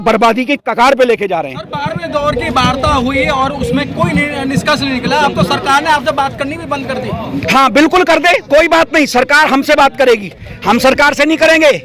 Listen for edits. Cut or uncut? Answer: uncut